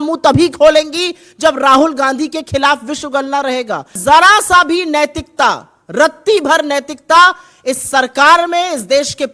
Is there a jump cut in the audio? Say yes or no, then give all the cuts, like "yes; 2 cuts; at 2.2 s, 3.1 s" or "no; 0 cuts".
yes; 1 cut; at 4.0 s